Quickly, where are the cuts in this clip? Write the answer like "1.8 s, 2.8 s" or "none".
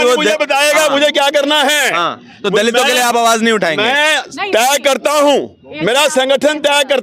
none